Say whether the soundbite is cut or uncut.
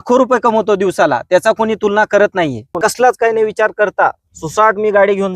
cut